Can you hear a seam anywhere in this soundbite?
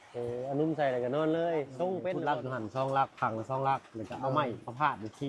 yes; 1 cut; at 2.2 s

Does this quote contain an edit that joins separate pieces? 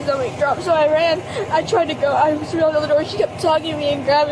no; 0 cuts

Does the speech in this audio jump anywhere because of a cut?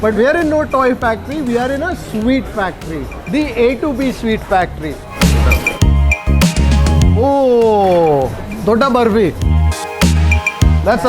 no; 0 cuts

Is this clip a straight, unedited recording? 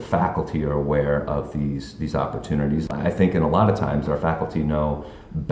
no; 1 cut; at 2.8 s

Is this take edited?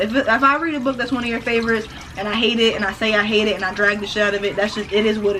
no; 0 cuts

